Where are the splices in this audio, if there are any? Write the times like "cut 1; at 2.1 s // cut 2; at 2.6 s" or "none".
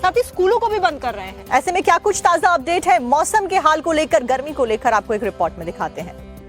none